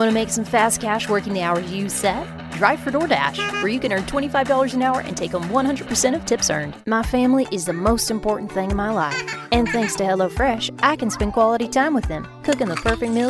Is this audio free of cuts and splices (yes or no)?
no